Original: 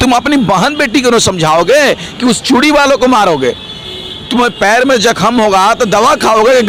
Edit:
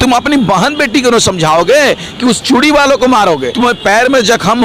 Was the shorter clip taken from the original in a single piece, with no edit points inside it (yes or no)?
no